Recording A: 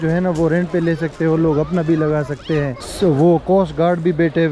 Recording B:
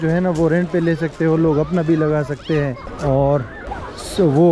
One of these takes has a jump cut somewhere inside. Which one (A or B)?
A